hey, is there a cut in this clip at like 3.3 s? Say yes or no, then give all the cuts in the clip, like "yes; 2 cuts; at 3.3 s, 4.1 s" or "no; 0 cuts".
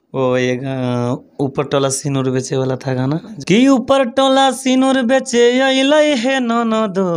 yes; 1 cut; at 3.3 s